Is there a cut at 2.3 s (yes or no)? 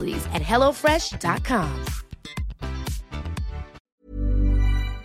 no